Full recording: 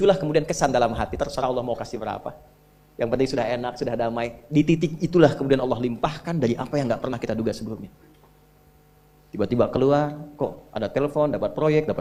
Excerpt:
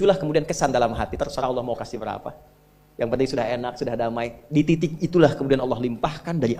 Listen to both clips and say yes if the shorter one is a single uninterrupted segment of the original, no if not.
yes